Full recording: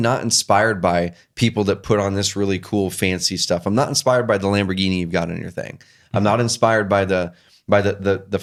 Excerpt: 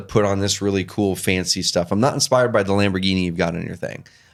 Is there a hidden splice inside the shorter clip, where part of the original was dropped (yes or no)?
no